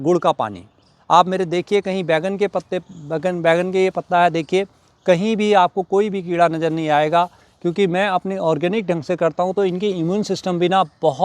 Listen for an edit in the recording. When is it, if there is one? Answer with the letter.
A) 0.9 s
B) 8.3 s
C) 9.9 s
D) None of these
A